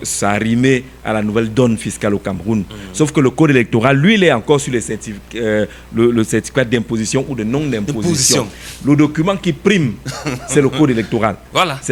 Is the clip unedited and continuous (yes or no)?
yes